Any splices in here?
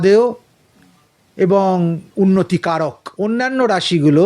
yes; 1 cut; at 3.0 s

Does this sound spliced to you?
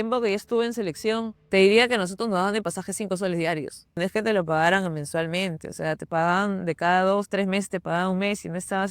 yes; 2 cuts; at 1.4 s, 4.0 s

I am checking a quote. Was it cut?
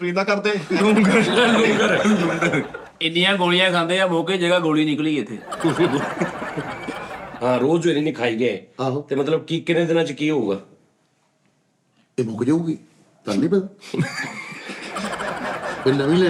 yes; 2 cuts; at 2.8 s, 7.3 s

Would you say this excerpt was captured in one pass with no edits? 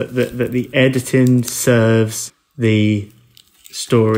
yes; 0 cuts

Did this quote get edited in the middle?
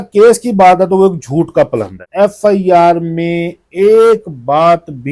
yes; 1 cut; at 2.0 s

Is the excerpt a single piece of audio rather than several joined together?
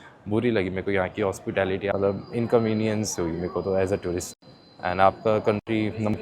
no; 1 cut; at 1.9 s

